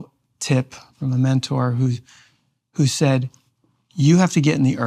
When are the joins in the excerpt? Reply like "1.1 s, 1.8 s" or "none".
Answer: 0.9 s